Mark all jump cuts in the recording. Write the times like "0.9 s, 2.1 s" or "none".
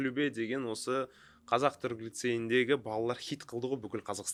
none